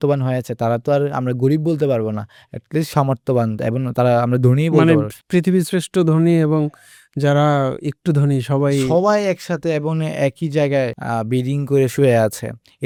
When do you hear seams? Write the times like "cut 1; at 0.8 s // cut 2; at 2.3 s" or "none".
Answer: none